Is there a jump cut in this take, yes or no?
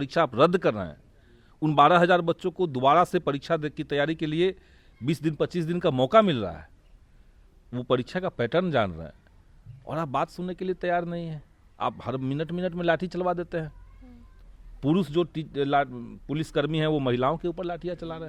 no